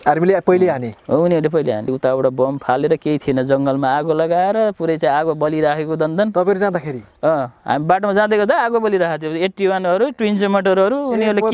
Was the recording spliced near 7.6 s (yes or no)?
no